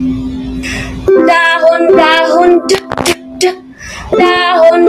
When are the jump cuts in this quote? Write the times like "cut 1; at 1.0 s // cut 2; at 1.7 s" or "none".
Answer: none